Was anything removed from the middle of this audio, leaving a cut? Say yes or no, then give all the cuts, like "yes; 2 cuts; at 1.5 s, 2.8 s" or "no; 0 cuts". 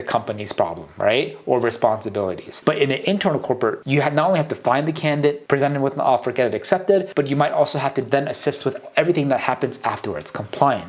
no; 0 cuts